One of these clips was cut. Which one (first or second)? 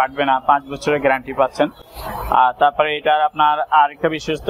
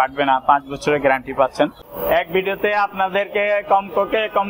second